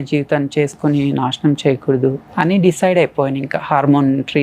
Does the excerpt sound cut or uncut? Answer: cut